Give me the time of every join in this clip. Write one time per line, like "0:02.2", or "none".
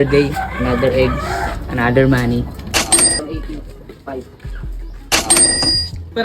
0:03.2